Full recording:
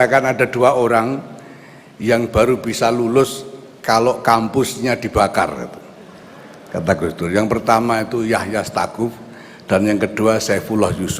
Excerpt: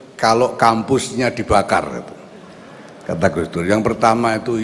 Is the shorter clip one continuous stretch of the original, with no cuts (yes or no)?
yes